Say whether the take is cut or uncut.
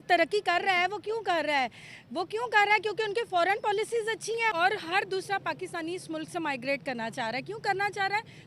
cut